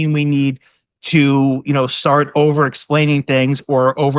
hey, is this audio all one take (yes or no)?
yes